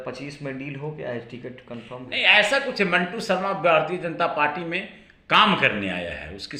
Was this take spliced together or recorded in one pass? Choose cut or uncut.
uncut